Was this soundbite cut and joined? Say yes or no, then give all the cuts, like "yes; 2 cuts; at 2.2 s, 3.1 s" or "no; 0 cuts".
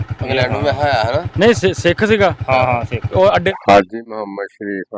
yes; 1 cut; at 3.5 s